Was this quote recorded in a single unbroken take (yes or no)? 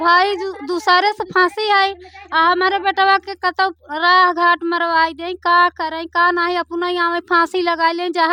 yes